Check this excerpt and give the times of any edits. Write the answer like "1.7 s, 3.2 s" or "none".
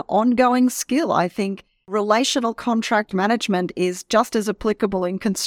1.9 s